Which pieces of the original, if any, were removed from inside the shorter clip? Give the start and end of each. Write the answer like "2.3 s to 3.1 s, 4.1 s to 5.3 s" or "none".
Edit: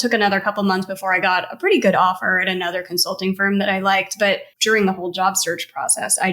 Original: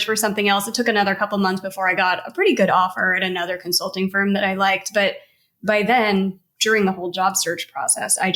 5.3 s to 6.5 s